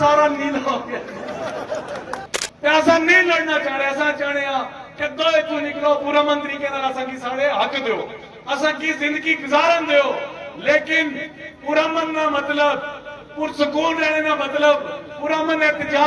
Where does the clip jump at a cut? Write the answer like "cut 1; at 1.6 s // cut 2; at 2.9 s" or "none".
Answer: cut 1; at 2.4 s